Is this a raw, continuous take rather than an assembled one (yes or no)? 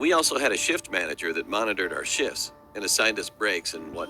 no